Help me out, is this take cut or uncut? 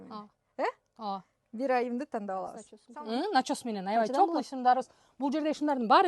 cut